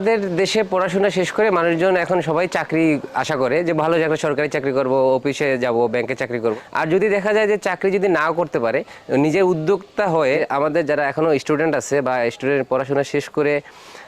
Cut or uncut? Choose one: cut